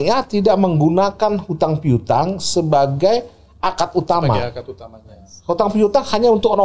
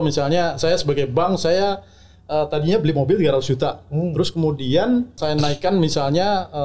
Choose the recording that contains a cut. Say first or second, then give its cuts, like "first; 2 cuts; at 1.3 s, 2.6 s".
second; 1 cut; at 5.2 s